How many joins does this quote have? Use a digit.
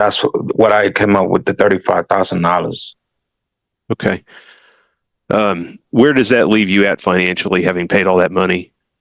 0